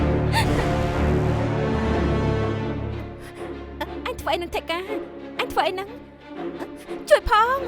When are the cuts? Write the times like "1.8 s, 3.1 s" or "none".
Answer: 3.9 s